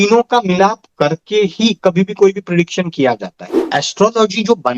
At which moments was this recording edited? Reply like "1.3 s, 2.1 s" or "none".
3.5 s